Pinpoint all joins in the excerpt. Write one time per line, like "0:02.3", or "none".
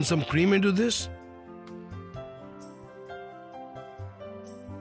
0:01.2